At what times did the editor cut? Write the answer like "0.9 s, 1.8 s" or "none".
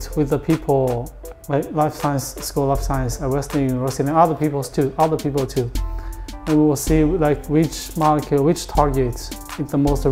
1.2 s